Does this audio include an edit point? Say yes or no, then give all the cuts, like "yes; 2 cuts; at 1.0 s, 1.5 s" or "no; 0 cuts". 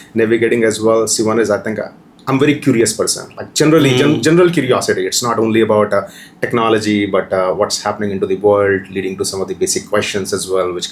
no; 0 cuts